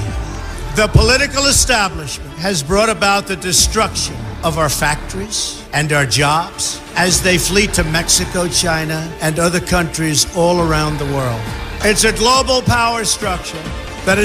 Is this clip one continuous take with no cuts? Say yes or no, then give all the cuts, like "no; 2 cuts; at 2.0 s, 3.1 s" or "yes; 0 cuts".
no; 1 cut; at 9.9 s